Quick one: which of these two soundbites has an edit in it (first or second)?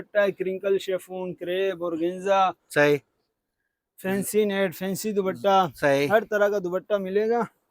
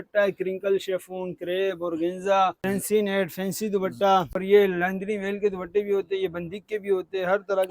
second